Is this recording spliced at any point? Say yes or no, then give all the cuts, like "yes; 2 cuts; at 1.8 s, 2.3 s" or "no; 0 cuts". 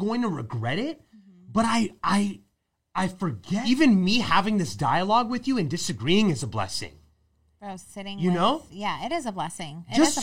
yes; 1 cut; at 3.6 s